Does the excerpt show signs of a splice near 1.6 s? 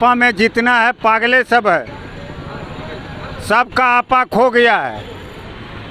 no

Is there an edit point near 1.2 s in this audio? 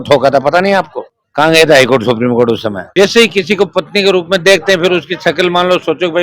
no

